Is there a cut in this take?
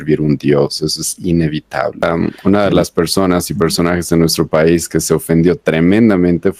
yes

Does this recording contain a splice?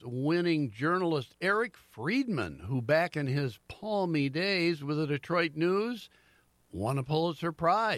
no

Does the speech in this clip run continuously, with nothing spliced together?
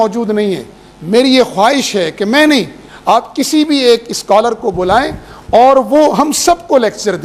yes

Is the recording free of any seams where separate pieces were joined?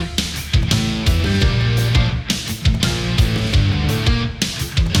yes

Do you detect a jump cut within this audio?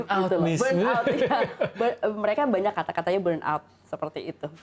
no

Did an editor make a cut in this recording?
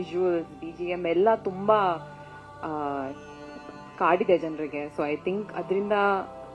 no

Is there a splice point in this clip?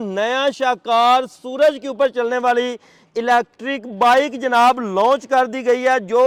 no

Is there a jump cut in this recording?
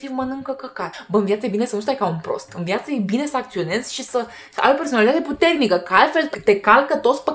yes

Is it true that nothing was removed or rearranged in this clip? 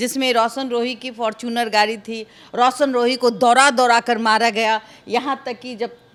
yes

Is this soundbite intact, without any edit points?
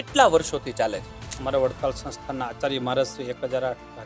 no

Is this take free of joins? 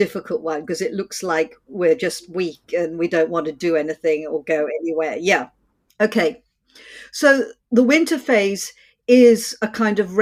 yes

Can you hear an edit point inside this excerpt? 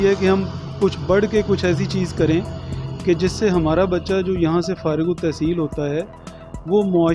no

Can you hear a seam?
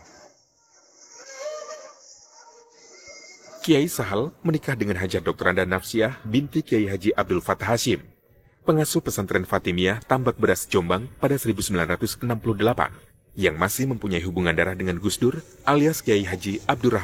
no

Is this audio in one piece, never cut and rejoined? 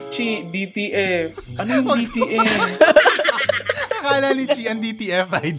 yes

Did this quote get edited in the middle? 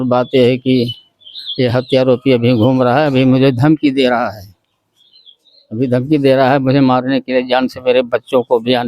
no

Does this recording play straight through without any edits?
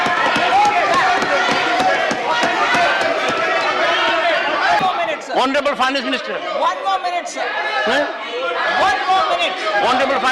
no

